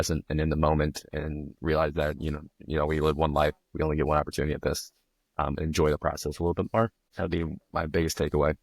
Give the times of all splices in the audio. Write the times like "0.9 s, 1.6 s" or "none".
7.0 s